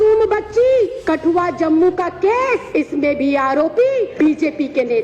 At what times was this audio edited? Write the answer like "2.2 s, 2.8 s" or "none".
1.0 s, 2.7 s, 4.1 s